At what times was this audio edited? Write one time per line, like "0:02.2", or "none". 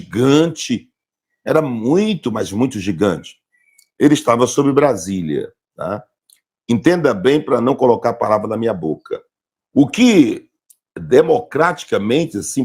0:09.3